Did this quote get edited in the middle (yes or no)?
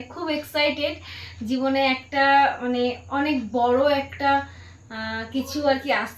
no